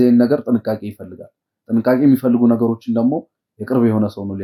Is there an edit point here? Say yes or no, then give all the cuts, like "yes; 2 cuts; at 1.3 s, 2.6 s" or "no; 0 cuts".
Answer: no; 0 cuts